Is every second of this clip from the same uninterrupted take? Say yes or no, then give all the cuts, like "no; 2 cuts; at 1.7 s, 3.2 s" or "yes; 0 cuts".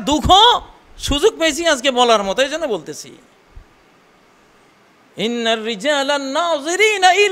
yes; 0 cuts